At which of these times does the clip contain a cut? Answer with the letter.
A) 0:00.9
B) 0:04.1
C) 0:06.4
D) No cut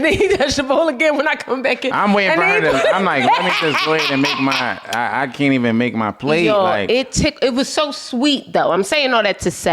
D